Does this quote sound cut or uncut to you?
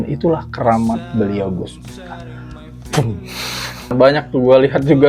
cut